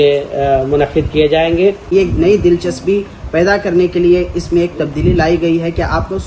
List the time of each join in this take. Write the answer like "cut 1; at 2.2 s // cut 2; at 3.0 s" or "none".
cut 1; at 1.8 s

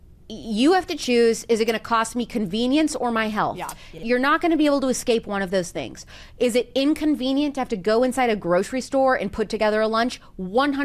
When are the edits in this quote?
cut 1; at 3.9 s

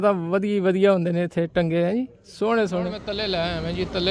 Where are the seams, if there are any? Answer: cut 1; at 3.0 s

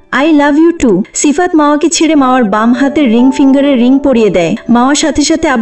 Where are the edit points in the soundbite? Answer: cut 1; at 1.1 s // cut 2; at 4.6 s

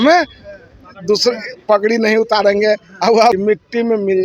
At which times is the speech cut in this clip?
cut 1; at 3.3 s

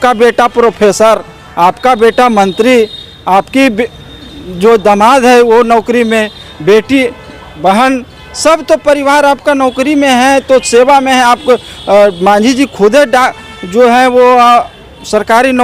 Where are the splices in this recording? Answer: none

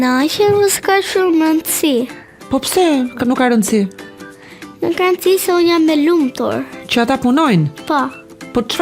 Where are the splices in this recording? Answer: none

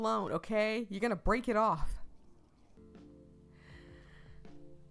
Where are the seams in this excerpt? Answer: cut 1; at 2.8 s

